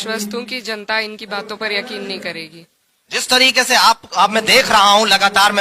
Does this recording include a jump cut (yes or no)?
no